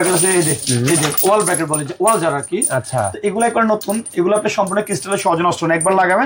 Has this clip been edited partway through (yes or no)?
no